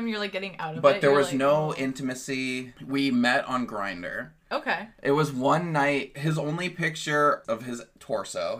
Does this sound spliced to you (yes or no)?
yes